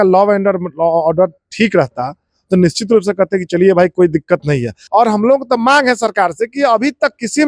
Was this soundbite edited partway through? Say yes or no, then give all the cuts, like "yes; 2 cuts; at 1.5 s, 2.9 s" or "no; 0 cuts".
yes; 1 cut; at 4.7 s